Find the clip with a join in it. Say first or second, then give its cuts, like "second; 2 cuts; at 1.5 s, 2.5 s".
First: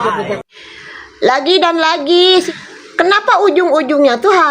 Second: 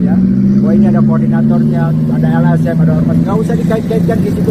first; 1 cut; at 2.5 s